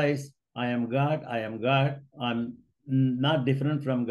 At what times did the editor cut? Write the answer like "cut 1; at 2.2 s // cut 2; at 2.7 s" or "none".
cut 1; at 2.1 s